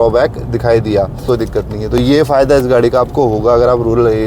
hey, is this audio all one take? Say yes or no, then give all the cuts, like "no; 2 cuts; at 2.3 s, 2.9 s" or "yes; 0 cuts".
no; 1 cut; at 1.2 s